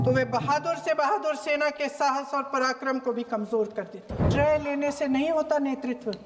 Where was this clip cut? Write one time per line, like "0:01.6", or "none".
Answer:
0:04.2

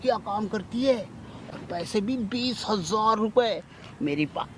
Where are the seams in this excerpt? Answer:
none

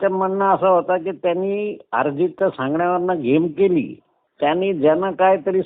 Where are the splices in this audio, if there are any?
0:04.2

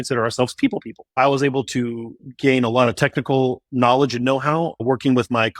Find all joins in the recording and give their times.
0:01.2
0:02.2
0:04.8

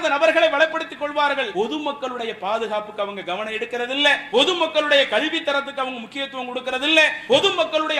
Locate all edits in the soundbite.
0:01.5
0:04.2
0:07.2

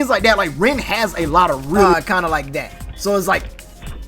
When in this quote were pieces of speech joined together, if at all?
0:01.9

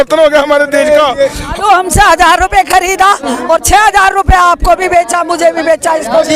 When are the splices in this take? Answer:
0:01.5

